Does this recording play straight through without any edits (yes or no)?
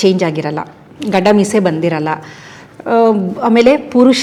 yes